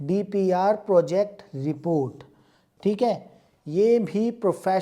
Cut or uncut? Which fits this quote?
uncut